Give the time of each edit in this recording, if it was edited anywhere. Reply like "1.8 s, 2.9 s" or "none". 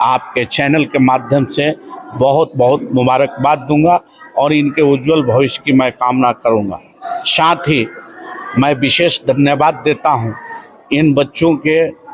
none